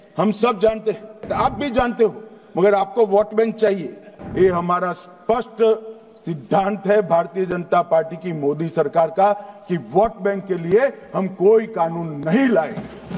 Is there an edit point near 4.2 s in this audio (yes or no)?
yes